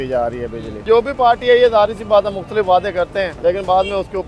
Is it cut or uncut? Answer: cut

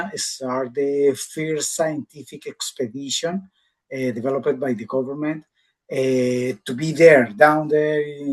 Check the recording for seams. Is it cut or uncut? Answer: uncut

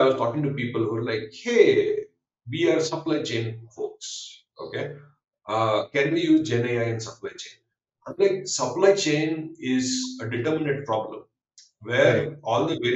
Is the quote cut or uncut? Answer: uncut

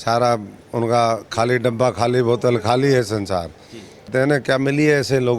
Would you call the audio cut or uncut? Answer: cut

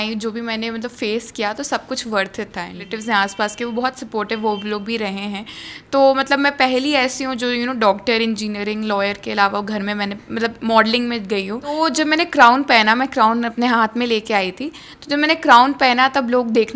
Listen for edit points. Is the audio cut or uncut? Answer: cut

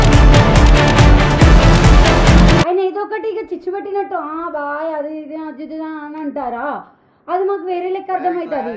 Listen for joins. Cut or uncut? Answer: cut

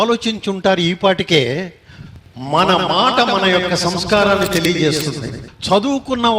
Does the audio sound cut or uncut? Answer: cut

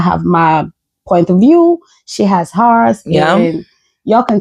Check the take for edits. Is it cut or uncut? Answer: uncut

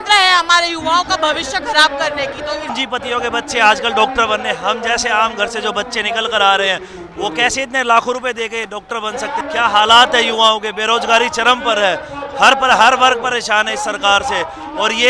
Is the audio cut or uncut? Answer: cut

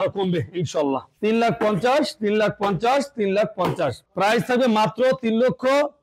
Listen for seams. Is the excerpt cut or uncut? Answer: cut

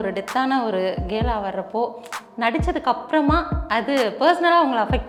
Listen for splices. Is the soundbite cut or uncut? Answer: uncut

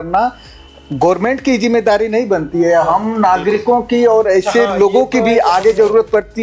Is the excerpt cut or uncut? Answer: uncut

